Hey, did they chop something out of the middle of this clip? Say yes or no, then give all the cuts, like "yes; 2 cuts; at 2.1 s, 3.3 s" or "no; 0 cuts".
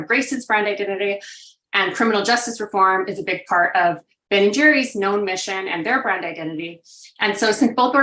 no; 0 cuts